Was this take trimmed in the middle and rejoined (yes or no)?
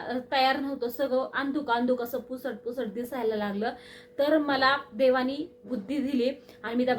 no